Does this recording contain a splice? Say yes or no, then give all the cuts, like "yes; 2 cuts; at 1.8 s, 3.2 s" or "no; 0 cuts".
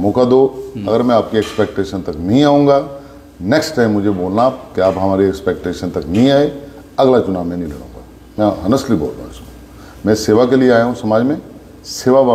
no; 0 cuts